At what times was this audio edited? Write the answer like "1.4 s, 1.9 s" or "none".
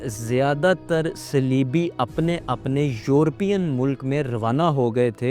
none